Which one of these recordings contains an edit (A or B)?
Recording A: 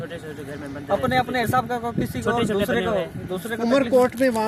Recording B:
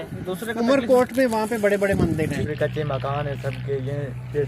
B